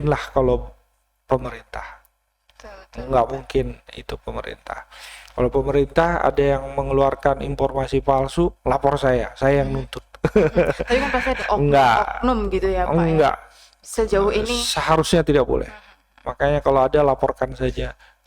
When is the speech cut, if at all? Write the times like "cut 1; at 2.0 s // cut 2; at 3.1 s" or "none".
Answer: none